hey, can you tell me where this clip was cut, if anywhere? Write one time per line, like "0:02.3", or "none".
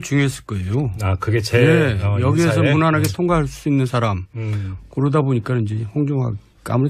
0:01.1